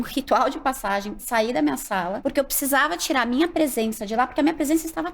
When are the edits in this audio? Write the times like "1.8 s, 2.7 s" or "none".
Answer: 1.2 s, 2.2 s

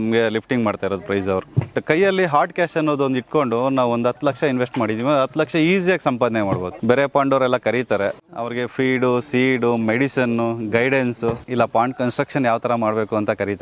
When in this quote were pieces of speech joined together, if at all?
1.8 s, 6.7 s, 8.3 s, 11.4 s

